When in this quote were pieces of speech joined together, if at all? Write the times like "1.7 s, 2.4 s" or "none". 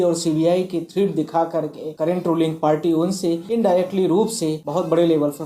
1.8 s, 3.4 s, 4.6 s